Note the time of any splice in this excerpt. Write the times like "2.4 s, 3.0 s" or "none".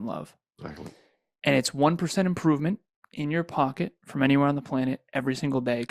none